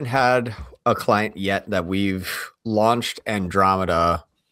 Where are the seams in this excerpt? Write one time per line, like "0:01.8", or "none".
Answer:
none